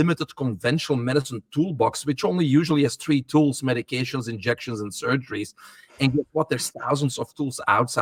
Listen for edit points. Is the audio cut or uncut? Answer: uncut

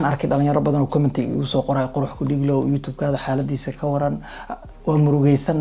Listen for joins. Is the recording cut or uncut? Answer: uncut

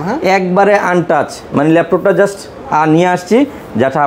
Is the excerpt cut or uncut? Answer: uncut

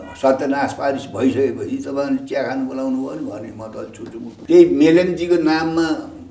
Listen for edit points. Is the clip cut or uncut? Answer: cut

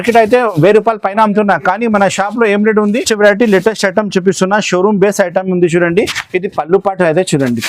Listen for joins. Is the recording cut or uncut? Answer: cut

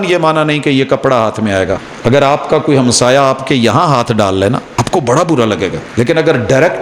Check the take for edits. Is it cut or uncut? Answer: cut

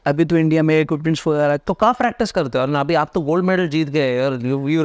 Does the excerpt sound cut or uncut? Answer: uncut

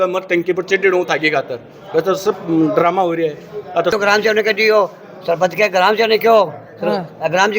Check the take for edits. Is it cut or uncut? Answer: cut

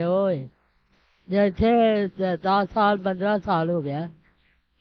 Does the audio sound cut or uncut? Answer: uncut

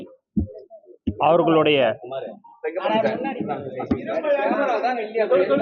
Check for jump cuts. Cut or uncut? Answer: uncut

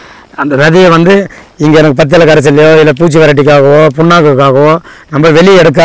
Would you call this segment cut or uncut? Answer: uncut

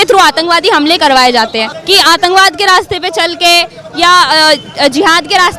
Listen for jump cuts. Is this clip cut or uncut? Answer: cut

